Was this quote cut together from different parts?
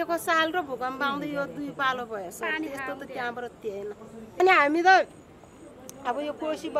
yes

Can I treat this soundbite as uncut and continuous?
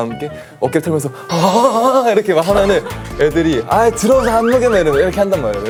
yes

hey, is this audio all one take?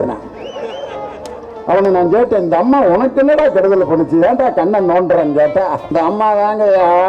no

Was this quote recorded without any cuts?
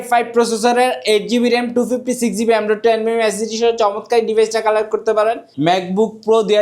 no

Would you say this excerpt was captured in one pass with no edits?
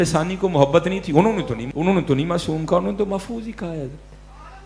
yes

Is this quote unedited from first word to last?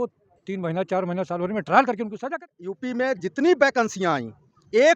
no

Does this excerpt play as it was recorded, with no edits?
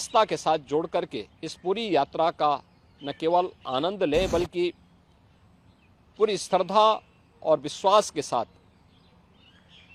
yes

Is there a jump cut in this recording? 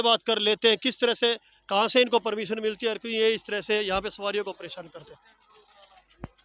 no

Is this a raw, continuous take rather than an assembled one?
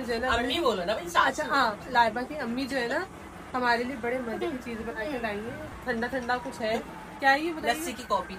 no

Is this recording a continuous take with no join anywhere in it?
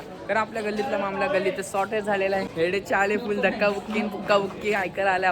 no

